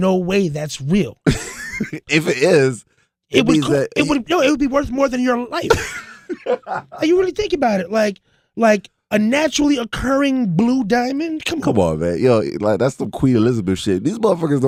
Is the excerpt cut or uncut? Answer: uncut